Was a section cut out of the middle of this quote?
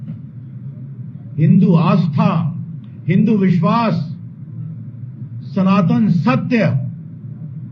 no; 0 cuts

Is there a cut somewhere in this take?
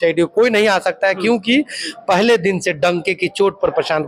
no; 0 cuts

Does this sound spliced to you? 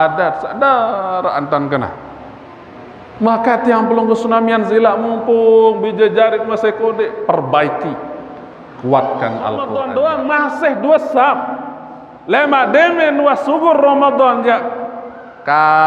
yes; 1 cut; at 9.7 s

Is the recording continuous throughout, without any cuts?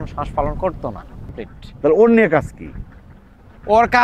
no; 1 cut; at 1.5 s

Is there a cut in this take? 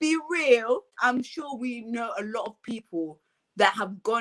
yes; 1 cut; at 0.9 s

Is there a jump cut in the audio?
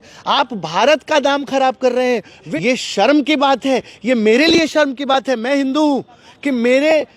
yes; 1 cut; at 2.4 s

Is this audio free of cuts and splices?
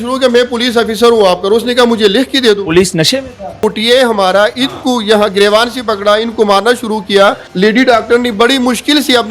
no; 2 cuts; at 3.6 s, 7.5 s

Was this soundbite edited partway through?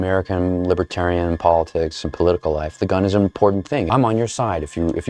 yes; 1 cut; at 3.9 s

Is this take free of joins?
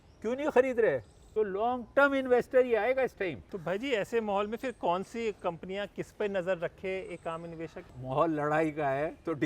no; 3 cuts; at 1.2 s, 3.5 s, 8.0 s

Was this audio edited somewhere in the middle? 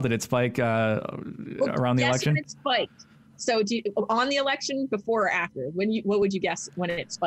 no; 0 cuts

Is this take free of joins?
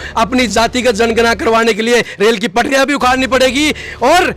yes; 0 cuts

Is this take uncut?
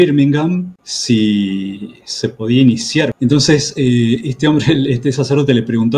no; 1 cut; at 3.1 s

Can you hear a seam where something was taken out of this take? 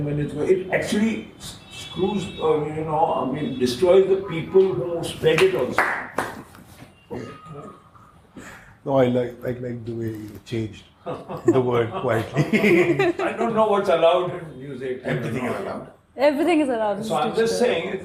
no; 0 cuts

